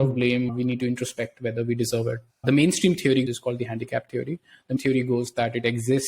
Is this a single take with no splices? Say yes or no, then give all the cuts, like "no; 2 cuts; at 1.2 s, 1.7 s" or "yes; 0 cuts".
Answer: no; 3 cuts; at 2.3 s, 3.3 s, 4.8 s